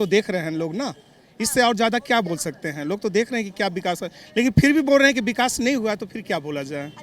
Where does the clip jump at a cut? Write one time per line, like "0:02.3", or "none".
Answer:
none